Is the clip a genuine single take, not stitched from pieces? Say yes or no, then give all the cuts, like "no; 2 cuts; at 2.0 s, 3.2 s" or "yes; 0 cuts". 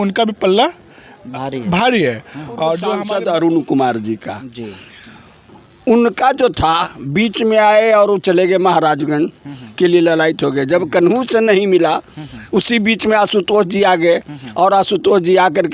no; 1 cut; at 3.0 s